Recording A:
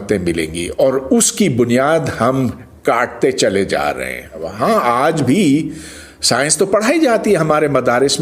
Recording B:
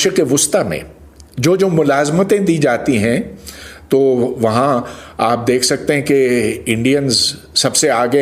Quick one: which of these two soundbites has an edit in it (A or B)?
A